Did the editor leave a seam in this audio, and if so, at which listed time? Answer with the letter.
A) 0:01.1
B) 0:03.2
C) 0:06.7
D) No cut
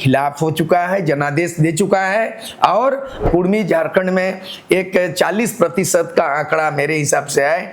B